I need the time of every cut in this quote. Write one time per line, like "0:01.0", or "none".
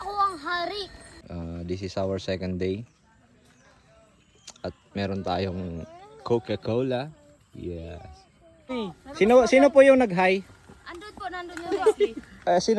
0:01.2
0:08.7